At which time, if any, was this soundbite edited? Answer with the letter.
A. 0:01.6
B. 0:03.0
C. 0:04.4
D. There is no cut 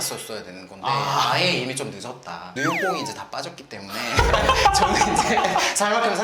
D